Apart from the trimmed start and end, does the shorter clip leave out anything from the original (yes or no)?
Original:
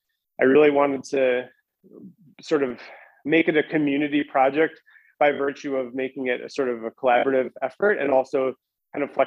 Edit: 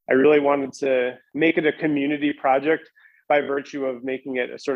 yes